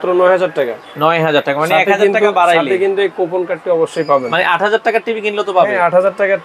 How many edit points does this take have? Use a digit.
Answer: 0